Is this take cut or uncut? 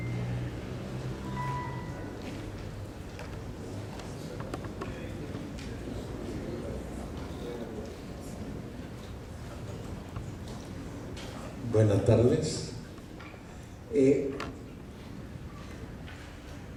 uncut